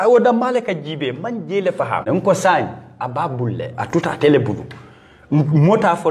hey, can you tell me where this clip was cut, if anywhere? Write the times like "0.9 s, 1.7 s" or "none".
2.0 s